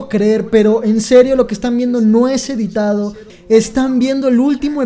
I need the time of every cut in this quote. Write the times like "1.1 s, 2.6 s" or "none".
3.3 s

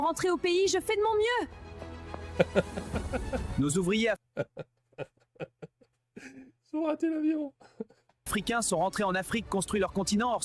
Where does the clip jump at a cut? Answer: none

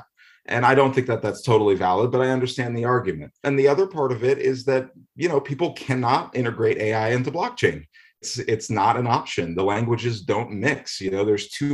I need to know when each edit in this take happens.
3.4 s, 8.2 s

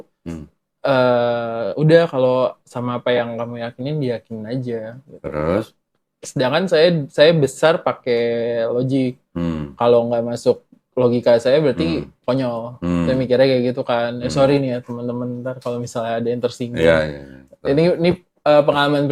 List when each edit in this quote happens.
17.0 s

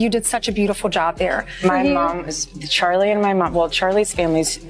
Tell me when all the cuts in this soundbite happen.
1.6 s

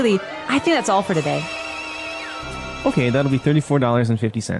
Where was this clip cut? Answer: 2.4 s

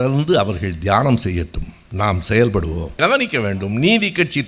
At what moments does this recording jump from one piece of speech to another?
2.9 s

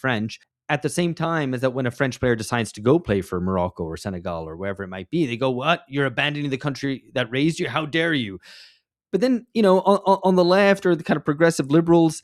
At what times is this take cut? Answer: none

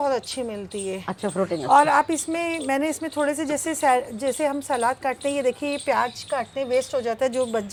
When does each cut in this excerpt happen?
none

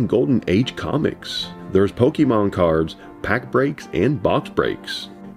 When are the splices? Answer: none

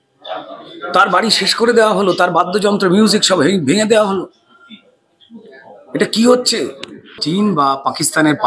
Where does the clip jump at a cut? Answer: 7.2 s

